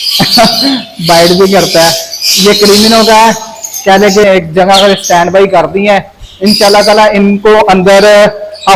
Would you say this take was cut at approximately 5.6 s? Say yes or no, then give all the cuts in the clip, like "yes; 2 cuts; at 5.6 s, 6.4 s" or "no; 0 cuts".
no; 1 cut; at 4.2 s